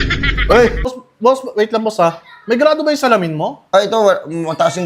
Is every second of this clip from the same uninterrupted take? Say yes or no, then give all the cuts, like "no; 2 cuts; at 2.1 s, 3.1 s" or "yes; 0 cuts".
no; 1 cut; at 1.0 s